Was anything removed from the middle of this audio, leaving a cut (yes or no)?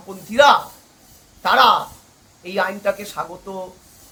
no